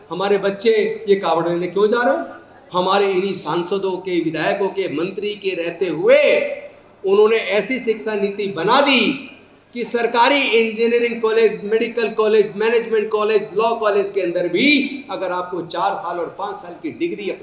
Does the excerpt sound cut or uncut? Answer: cut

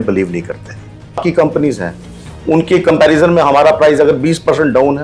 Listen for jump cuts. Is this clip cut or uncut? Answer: cut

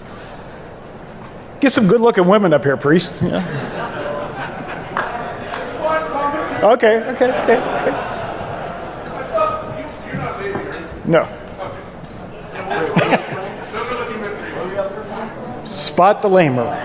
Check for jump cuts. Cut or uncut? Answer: cut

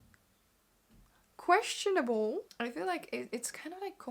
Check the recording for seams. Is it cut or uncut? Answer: cut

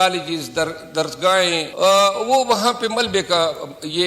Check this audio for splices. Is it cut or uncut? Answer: cut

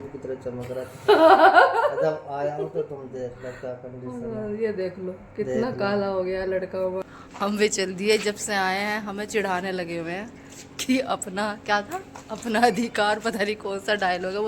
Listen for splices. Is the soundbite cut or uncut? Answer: cut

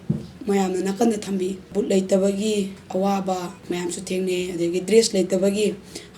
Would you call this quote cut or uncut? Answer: cut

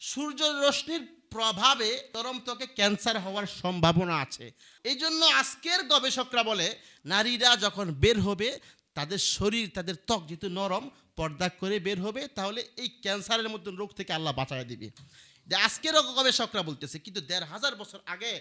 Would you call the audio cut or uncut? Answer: uncut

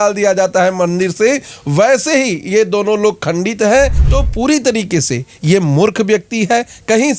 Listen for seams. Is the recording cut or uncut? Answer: cut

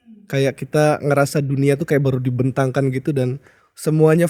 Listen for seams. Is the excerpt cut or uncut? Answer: uncut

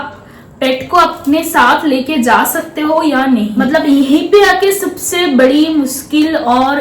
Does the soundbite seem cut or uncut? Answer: cut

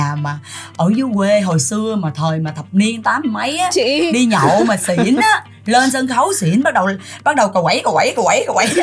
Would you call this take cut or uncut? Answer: uncut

